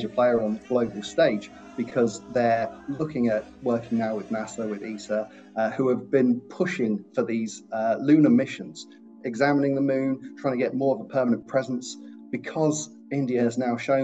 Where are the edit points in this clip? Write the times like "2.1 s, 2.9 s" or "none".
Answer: none